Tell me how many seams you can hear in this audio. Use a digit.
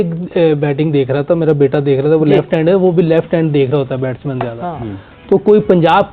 0